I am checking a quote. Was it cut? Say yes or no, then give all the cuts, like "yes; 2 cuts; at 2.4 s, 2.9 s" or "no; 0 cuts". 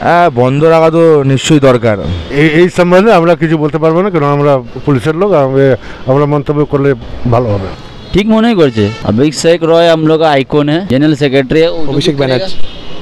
yes; 4 cuts; at 2.2 s, 7.7 s, 9.0 s, 10.8 s